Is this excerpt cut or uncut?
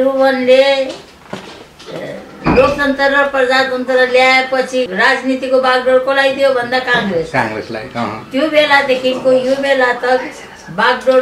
cut